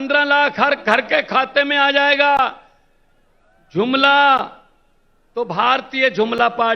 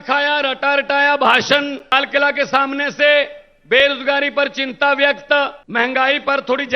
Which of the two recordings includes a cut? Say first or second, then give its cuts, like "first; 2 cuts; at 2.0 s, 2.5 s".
second; 2 cuts; at 1.9 s, 5.6 s